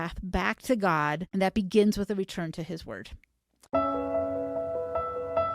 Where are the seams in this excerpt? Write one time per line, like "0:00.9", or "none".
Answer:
0:01.2
0:03.6